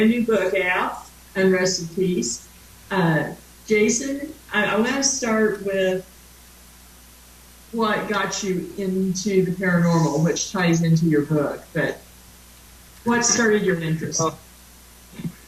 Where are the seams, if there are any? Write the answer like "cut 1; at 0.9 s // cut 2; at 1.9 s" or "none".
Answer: none

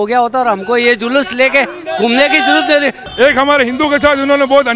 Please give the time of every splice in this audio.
cut 1; at 3.0 s

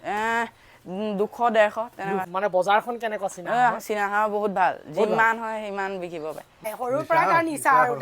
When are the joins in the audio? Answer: cut 1; at 2.2 s // cut 2; at 6.6 s

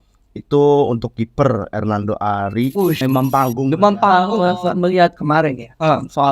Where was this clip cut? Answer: cut 1; at 3.0 s

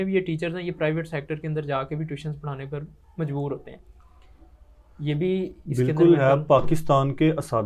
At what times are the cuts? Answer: none

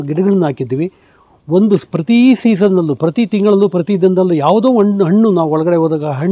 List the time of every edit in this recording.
none

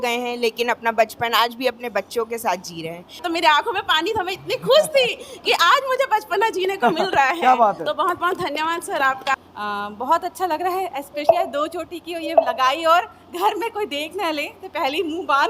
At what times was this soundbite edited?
cut 1; at 3.2 s // cut 2; at 9.3 s

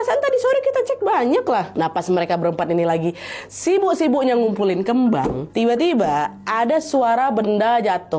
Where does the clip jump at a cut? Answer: cut 1; at 1.7 s // cut 2; at 5.4 s

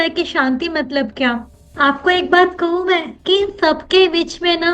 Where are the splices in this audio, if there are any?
cut 1; at 1.6 s

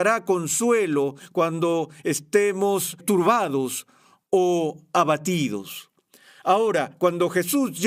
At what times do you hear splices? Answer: cut 1; at 3.0 s

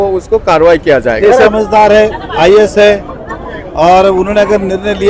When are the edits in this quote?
cut 1; at 1.5 s

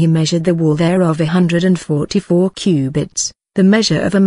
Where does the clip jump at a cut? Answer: none

